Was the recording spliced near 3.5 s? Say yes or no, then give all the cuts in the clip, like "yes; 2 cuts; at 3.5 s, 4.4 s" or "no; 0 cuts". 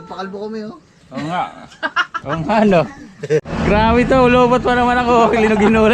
yes; 1 cut; at 3.5 s